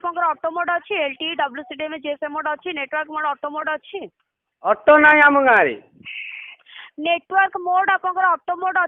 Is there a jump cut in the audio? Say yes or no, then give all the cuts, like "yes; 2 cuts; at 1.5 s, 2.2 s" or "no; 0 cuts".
no; 0 cuts